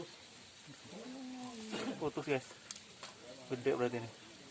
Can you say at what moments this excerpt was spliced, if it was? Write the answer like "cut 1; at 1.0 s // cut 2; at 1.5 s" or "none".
none